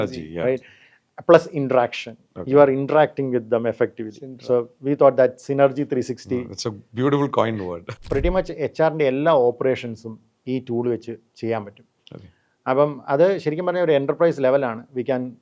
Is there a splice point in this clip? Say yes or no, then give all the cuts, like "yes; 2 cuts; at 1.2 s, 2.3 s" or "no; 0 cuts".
yes; 1 cut; at 7.8 s